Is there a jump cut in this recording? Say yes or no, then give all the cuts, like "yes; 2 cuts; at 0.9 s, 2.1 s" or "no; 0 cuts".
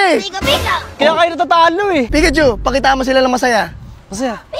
yes; 1 cut; at 2.1 s